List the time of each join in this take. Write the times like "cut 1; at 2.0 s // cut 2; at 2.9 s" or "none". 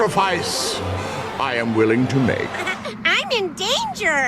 cut 1; at 2.6 s